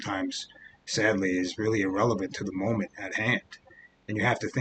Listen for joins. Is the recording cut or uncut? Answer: uncut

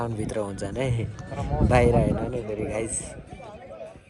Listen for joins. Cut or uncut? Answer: uncut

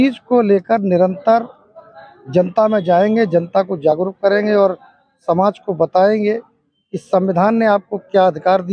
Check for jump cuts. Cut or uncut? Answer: uncut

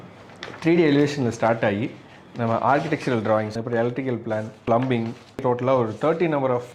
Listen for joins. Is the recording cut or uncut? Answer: cut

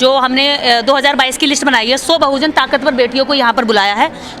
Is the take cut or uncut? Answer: uncut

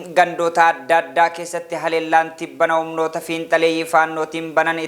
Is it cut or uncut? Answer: uncut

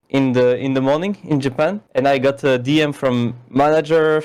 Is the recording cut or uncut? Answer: uncut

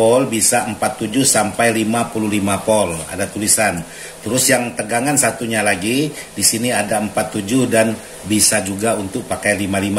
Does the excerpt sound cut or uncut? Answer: uncut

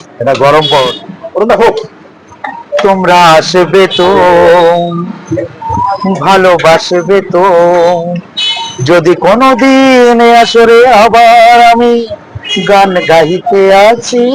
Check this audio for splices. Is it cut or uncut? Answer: cut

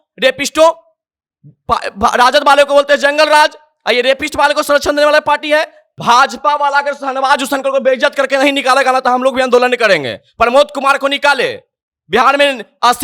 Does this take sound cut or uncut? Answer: cut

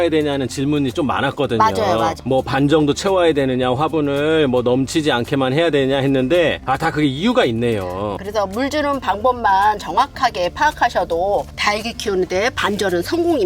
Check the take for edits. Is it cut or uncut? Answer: cut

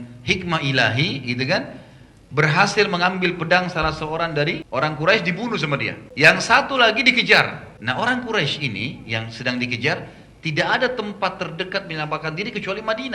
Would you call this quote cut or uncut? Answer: cut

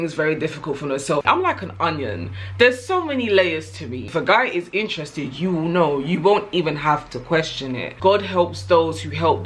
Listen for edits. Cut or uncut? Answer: cut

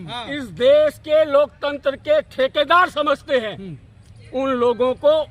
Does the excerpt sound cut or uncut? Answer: uncut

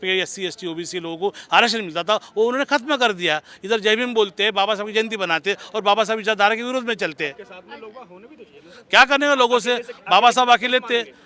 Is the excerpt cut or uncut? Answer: uncut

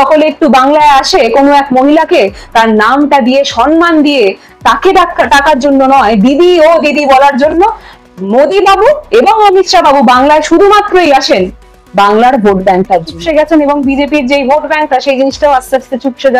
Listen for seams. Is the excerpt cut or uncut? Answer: cut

